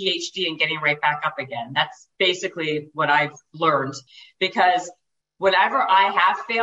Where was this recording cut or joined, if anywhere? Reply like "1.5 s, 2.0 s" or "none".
4.0 s